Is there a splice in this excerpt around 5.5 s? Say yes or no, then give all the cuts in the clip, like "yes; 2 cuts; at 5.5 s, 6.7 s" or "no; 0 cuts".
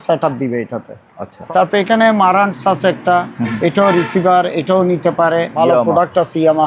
yes; 2 cuts; at 1.3 s, 5.5 s